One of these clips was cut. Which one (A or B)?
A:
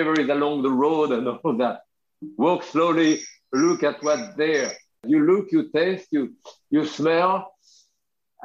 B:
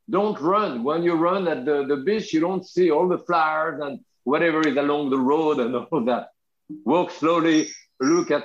A